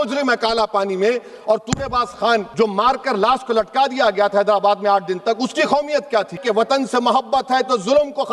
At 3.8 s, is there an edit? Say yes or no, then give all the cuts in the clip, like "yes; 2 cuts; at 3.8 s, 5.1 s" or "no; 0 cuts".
no; 2 cuts; at 2.5 s, 6.4 s